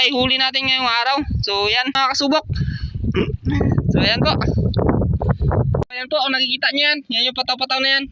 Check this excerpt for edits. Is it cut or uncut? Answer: cut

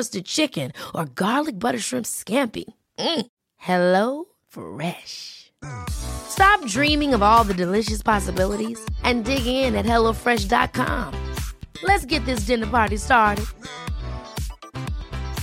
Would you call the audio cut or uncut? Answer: uncut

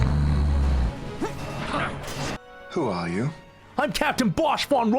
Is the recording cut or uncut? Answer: cut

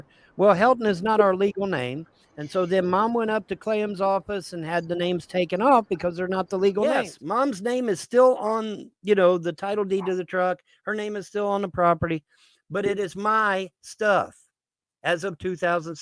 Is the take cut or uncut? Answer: cut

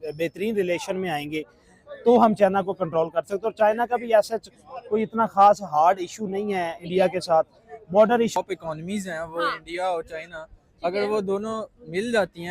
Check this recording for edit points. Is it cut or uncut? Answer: cut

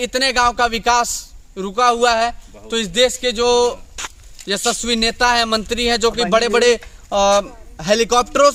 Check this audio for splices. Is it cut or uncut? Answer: uncut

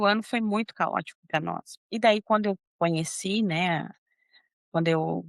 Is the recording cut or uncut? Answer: cut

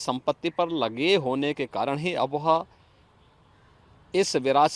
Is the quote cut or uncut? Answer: uncut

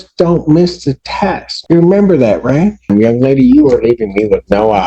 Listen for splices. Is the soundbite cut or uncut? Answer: cut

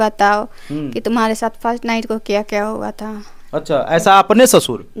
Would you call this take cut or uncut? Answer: uncut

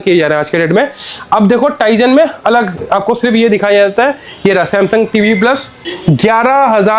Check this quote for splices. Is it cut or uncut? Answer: cut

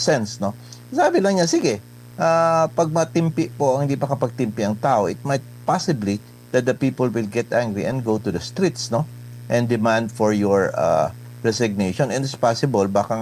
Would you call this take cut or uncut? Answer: uncut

